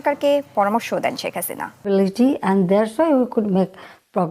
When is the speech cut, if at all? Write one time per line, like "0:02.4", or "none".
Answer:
0:01.7